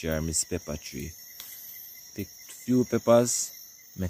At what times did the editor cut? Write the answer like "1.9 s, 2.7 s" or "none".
none